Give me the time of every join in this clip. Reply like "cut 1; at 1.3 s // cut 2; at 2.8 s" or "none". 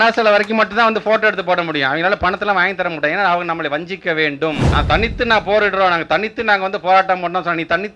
cut 1; at 4.6 s